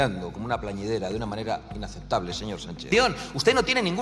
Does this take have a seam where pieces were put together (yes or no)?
yes